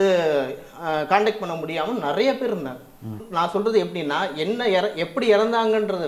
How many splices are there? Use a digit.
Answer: 1